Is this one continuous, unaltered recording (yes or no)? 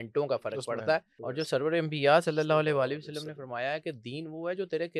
no